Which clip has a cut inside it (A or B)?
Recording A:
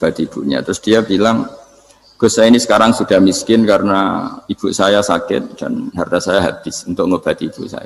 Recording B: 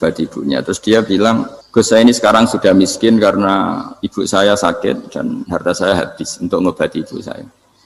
B